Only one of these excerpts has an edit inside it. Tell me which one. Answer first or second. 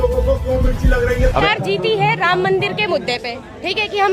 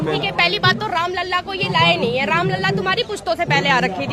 first